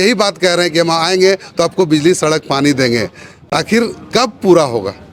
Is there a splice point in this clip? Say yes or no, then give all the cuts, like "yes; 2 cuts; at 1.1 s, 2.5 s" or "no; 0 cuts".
no; 0 cuts